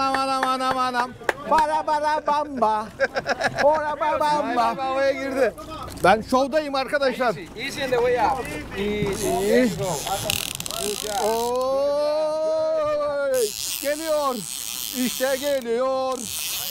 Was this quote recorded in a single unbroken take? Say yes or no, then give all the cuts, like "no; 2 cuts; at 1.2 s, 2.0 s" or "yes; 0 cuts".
yes; 0 cuts